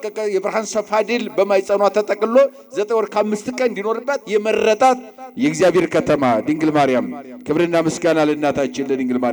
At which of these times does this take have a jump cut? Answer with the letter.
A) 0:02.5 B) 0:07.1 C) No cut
C